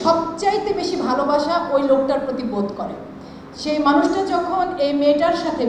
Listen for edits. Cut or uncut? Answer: uncut